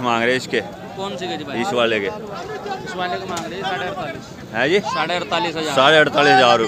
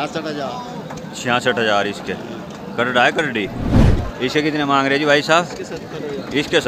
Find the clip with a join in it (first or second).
second